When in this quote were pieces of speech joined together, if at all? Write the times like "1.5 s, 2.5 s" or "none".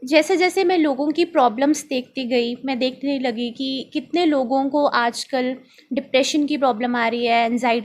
none